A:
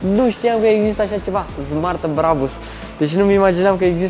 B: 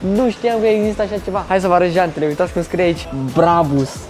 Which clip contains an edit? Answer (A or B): B